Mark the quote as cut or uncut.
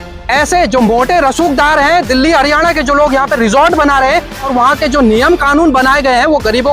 cut